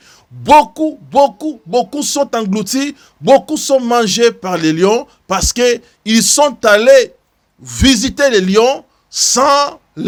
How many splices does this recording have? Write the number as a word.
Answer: zero